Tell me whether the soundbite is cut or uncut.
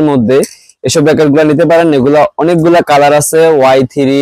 cut